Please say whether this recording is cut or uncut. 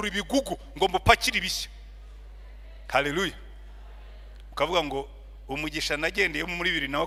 uncut